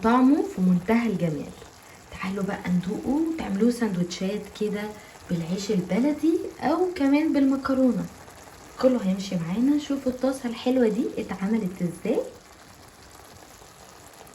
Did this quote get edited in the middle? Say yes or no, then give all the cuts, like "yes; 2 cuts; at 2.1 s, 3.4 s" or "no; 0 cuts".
no; 0 cuts